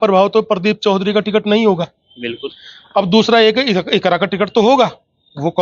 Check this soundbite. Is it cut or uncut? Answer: uncut